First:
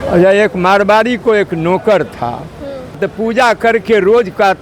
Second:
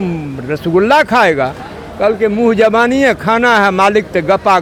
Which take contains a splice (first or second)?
first